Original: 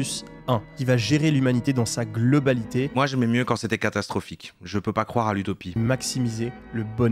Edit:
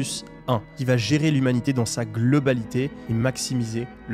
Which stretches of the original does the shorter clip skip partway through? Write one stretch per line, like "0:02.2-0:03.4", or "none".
0:02.9-0:05.6